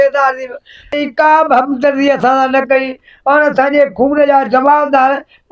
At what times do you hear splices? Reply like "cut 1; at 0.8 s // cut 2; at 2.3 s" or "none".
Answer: cut 1; at 0.9 s